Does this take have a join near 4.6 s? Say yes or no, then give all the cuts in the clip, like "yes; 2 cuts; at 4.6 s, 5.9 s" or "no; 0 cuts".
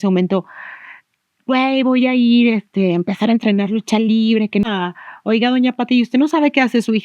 yes; 1 cut; at 4.6 s